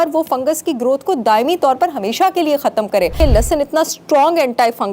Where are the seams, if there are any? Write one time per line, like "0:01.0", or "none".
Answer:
0:03.1